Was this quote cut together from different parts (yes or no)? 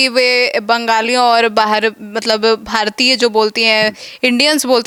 no